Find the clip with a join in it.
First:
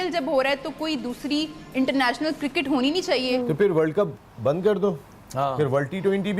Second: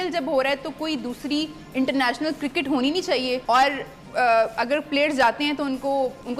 first; 1 cut; at 3.4 s

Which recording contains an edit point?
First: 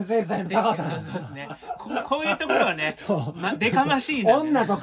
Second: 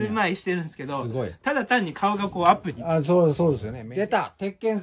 second; 1 cut; at 3.8 s

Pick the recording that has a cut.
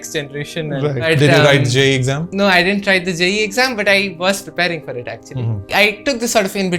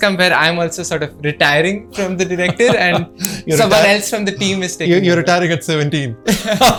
first; 3 cuts; at 1.1 s, 2.3 s, 5.7 s

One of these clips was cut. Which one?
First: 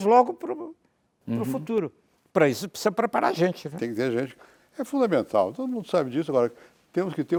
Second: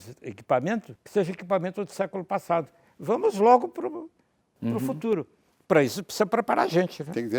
second; 1 cut; at 1.0 s

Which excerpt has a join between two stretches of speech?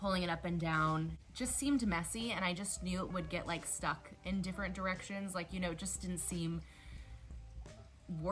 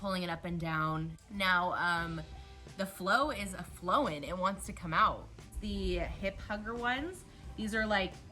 second; 2 cuts; at 1.2 s, 5.5 s

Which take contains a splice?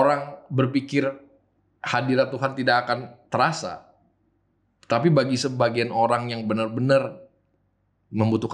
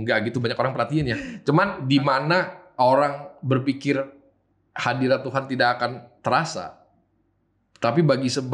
second; 1 cut; at 1.7 s

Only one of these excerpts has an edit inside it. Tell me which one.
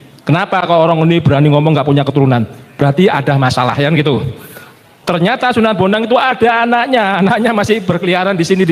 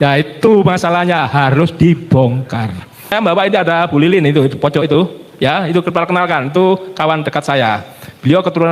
second; 1 cut; at 3.1 s

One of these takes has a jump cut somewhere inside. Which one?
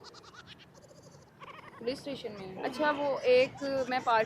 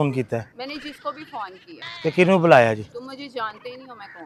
first; 1 cut; at 2.4 s

